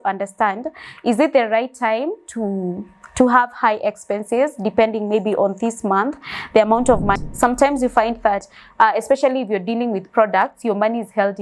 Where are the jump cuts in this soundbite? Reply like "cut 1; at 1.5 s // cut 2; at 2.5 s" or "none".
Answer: cut 1; at 7.2 s